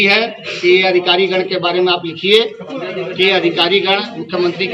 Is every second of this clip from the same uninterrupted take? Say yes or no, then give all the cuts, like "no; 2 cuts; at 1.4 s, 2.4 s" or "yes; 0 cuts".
yes; 0 cuts